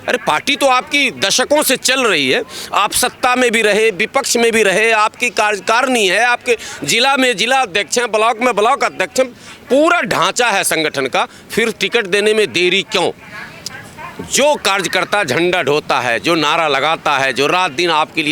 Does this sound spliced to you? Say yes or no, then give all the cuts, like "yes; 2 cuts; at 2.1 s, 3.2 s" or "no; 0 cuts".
no; 0 cuts